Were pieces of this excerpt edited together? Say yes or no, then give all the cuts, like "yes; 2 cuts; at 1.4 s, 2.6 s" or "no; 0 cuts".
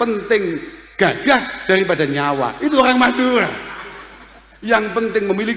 no; 0 cuts